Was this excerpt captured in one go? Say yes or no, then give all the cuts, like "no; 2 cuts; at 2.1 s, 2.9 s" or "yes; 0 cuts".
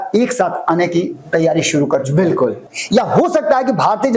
no; 1 cut; at 2.7 s